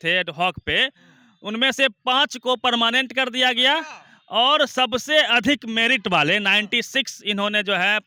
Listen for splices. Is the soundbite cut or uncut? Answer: uncut